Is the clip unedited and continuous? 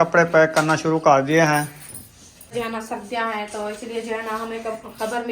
no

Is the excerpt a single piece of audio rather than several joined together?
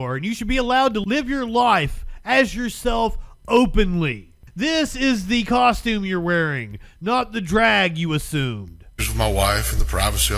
no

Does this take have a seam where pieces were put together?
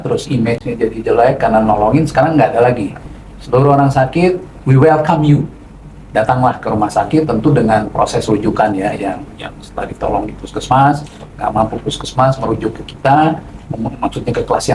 no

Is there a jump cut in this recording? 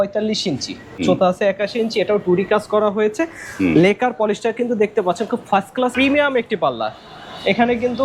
yes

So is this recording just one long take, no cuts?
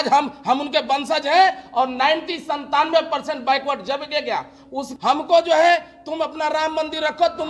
no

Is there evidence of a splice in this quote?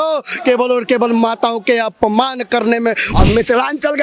yes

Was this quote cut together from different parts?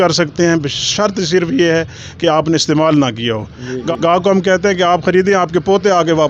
no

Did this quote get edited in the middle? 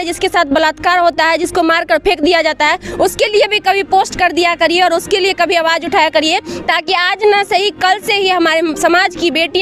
no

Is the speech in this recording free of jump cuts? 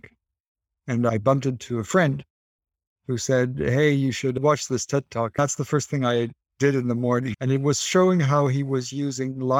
no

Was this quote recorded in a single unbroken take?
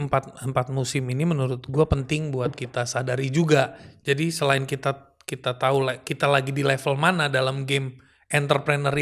yes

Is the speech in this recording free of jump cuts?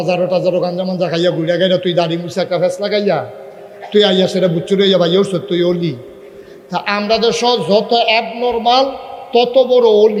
yes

